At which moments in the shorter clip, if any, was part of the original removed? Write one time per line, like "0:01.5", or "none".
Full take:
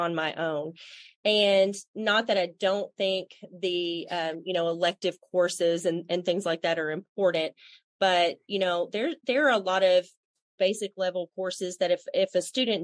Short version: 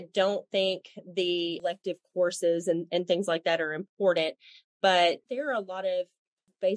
0:01.6
0:05.2